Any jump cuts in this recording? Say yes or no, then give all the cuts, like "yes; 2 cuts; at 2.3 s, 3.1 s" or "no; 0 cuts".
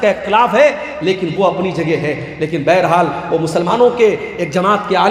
no; 0 cuts